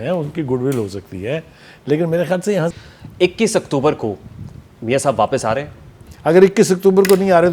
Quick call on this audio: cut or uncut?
cut